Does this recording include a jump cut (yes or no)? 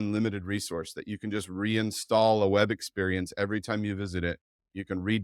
no